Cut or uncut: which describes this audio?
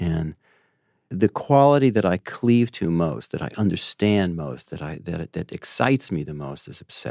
cut